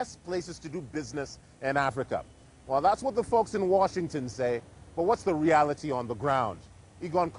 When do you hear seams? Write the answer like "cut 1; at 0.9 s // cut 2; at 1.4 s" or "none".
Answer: none